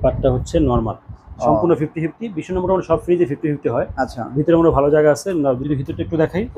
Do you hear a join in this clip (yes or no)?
yes